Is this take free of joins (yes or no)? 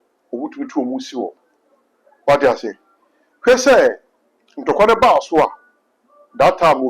yes